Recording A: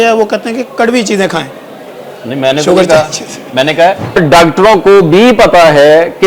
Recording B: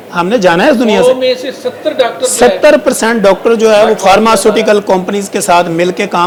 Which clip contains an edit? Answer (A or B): A